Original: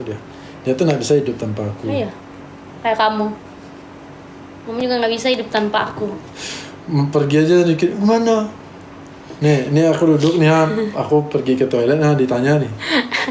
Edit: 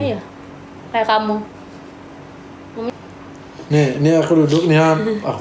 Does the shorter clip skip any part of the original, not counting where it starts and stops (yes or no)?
yes